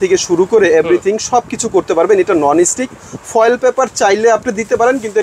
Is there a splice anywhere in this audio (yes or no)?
no